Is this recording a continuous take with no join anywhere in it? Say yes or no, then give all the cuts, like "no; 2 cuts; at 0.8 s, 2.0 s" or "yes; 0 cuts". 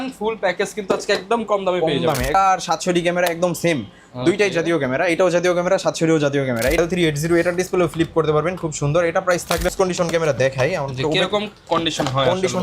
no; 3 cuts; at 2.3 s, 6.8 s, 9.7 s